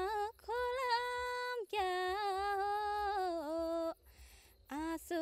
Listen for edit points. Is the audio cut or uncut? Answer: uncut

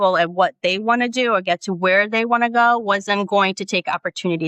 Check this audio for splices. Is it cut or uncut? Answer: uncut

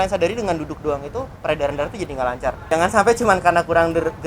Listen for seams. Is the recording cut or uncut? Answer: cut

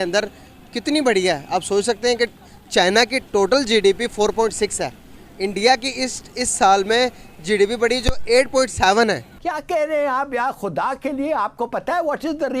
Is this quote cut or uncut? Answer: cut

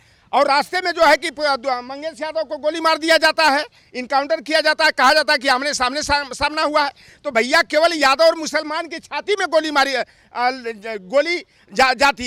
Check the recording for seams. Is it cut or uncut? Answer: uncut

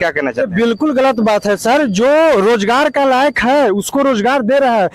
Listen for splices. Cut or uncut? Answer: uncut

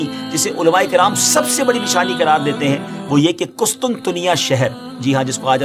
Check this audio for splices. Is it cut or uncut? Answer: uncut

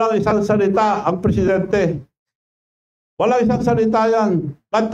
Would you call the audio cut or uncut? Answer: uncut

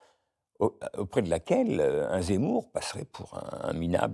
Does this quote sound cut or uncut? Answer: uncut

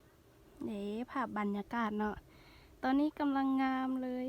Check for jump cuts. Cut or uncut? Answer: uncut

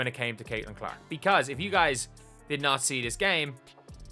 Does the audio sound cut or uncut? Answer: uncut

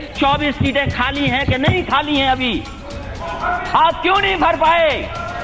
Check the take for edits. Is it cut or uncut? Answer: uncut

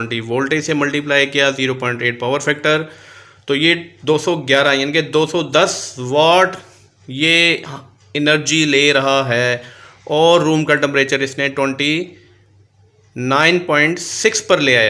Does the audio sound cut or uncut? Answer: uncut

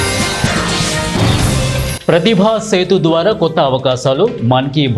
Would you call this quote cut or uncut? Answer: uncut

